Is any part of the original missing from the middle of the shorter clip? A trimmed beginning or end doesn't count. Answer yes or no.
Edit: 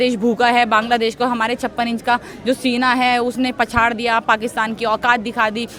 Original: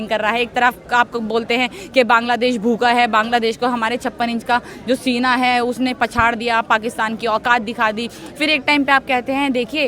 no